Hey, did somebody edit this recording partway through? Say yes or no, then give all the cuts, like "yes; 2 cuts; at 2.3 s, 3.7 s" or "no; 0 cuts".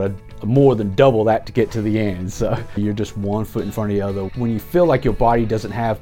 yes; 2 cuts; at 2.8 s, 4.3 s